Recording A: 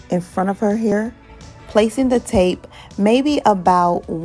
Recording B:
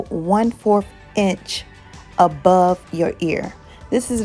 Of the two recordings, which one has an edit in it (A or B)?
A